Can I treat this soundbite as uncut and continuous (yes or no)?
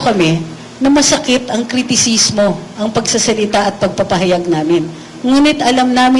yes